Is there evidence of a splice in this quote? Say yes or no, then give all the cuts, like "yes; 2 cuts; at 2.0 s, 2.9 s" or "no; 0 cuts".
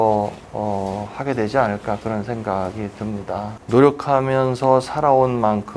no; 0 cuts